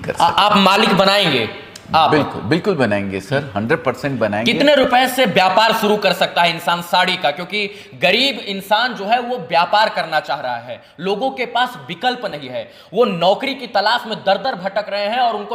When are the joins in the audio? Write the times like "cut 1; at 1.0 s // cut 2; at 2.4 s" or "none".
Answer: none